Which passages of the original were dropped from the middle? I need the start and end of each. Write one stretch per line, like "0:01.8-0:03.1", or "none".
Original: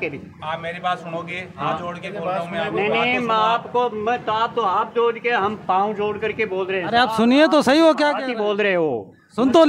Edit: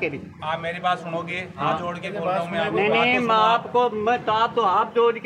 none